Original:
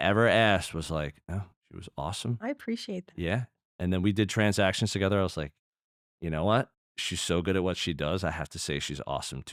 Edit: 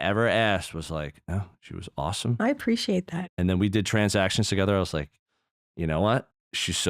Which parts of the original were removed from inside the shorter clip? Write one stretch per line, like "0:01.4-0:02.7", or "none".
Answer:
0:03.1-0:03.5